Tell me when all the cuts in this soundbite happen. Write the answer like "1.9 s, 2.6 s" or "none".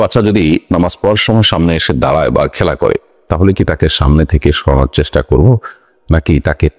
none